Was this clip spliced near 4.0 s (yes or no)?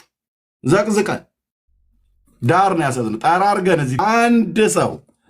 yes